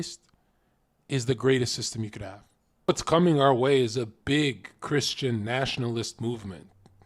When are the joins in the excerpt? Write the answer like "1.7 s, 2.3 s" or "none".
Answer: 2.9 s